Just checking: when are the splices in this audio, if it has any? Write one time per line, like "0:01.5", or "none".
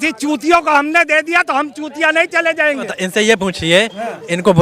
0:02.9